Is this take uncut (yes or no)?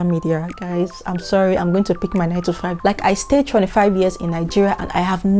no